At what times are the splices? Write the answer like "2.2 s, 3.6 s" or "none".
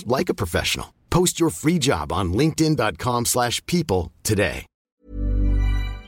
5.1 s